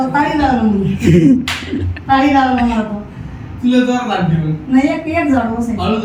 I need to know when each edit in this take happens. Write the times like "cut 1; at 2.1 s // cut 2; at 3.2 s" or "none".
none